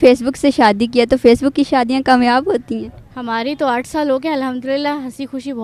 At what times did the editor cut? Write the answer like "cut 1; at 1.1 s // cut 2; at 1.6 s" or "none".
none